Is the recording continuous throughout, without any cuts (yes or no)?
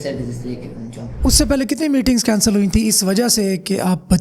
no